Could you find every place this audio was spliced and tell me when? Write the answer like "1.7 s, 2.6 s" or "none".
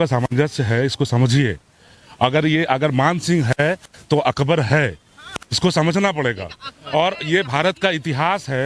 none